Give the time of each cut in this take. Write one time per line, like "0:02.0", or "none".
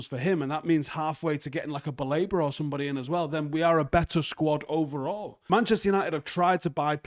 0:05.3